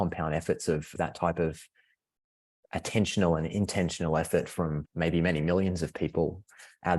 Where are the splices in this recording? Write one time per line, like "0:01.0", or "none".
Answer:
none